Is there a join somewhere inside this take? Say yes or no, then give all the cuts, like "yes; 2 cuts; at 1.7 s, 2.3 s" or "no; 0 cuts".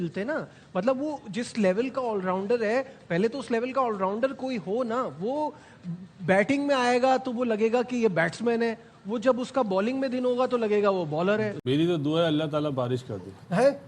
yes; 1 cut; at 11.6 s